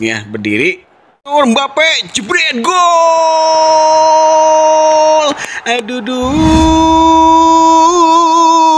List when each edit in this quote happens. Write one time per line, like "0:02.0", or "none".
0:01.3